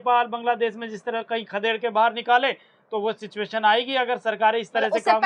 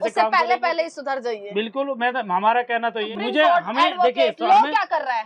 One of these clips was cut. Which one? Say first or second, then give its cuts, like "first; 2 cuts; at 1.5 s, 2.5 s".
second; 1 cut; at 3.1 s